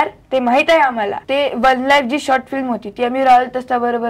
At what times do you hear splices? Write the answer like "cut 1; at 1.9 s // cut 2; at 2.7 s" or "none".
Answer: cut 1; at 1.2 s